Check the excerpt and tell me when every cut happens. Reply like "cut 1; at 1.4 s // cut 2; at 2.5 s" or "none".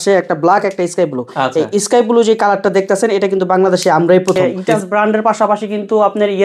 cut 1; at 4.4 s

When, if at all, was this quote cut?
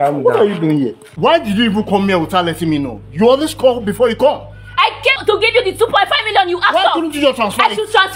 cut 1; at 1.0 s // cut 2; at 5.2 s

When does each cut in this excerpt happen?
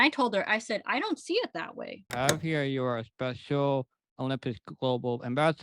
cut 1; at 2.1 s

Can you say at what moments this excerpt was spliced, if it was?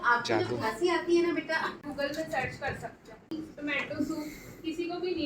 cut 1; at 1.8 s // cut 2; at 3.3 s

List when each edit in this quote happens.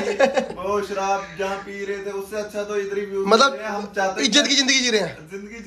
none

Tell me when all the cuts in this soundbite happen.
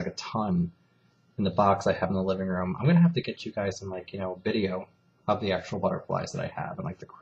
cut 1; at 3.8 s

